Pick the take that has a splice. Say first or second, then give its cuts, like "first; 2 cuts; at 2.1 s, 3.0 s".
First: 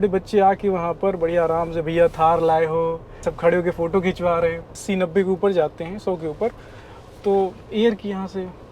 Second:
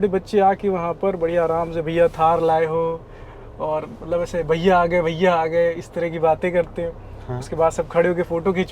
first; 2 cuts; at 3.3 s, 4.8 s